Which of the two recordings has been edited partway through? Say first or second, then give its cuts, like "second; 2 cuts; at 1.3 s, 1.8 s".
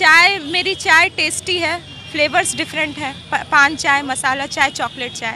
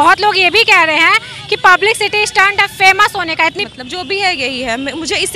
second; 1 cut; at 3.6 s